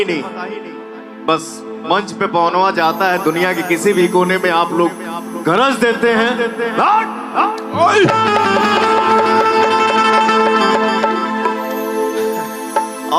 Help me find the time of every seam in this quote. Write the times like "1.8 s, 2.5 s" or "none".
none